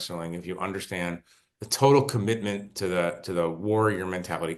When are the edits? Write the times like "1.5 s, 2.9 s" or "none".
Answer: none